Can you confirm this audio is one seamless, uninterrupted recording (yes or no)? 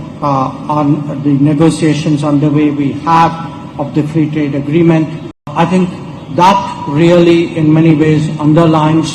no